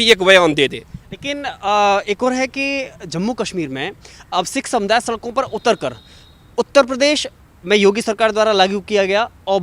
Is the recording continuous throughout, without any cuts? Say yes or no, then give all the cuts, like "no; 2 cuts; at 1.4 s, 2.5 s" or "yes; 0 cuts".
yes; 0 cuts